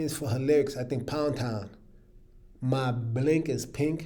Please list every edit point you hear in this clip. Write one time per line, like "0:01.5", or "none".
none